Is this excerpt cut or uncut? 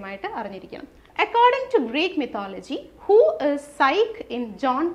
cut